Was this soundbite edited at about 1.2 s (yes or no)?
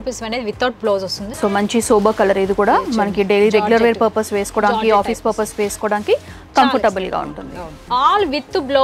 yes